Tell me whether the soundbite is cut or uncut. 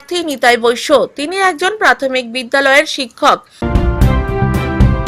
cut